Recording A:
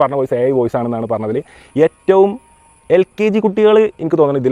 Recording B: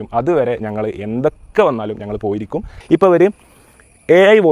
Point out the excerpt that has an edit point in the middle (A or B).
B